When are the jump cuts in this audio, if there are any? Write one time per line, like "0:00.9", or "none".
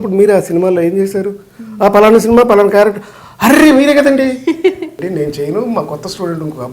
0:05.0

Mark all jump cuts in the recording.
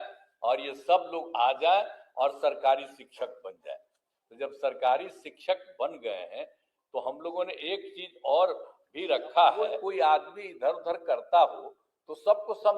0:09.7

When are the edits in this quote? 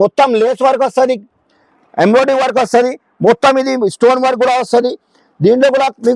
none

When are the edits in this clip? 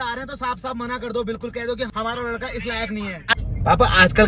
0:01.9
0:03.2

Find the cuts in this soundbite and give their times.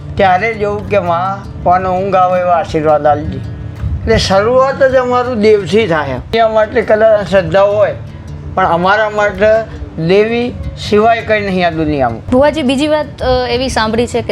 0:06.3
0:12.2

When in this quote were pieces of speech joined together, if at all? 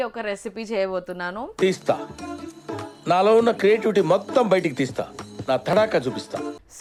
none

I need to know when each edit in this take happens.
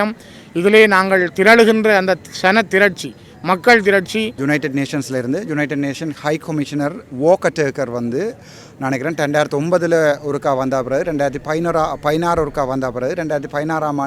0:04.3

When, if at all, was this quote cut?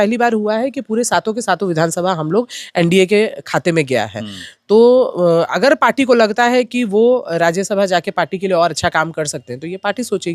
none

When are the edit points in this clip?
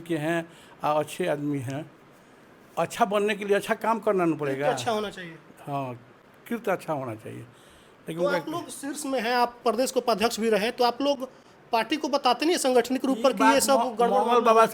none

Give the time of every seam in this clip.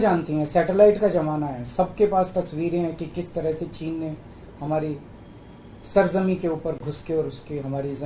none

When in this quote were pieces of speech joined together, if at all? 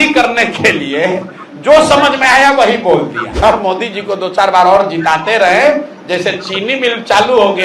0:03.2

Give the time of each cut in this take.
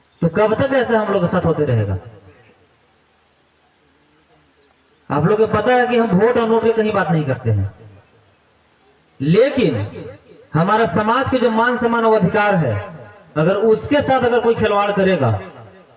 none

